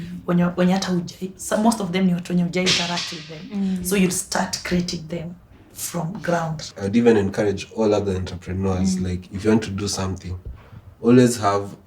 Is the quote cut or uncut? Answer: cut